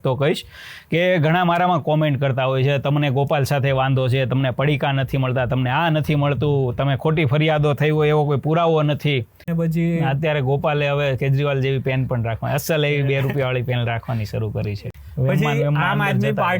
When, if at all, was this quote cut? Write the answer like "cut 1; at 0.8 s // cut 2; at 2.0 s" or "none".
cut 1; at 9.4 s // cut 2; at 14.8 s